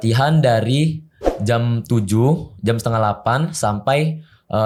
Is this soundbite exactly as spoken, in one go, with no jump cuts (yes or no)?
yes